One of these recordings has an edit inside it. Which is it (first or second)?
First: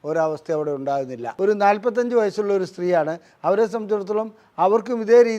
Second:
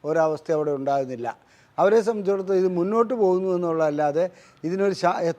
first